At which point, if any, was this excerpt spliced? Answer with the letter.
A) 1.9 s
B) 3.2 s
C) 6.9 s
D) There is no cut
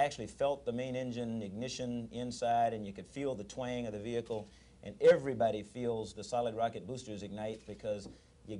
A